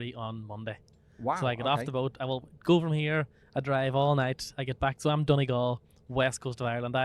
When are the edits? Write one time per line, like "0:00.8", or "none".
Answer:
none

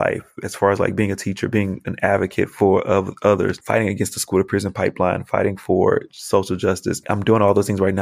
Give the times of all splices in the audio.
none

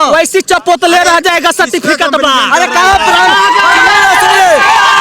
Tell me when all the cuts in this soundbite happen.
none

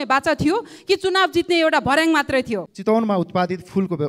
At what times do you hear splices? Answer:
0:02.7

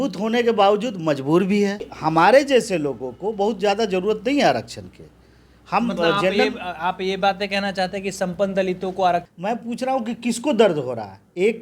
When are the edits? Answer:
0:01.9
0:09.3

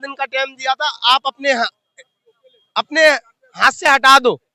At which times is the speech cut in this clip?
none

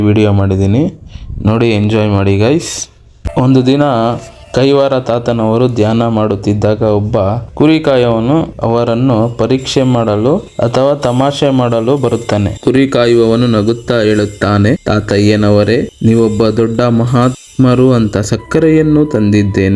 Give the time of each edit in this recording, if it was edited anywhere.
none

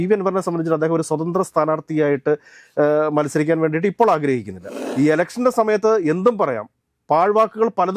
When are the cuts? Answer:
0:04.8

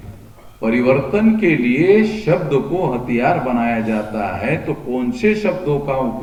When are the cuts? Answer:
none

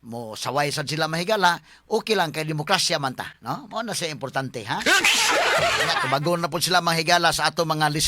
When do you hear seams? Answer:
0:05.9

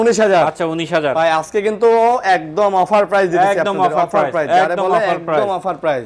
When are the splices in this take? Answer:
none

